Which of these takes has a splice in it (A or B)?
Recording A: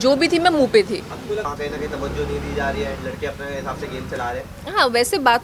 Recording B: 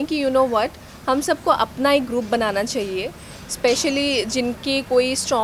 A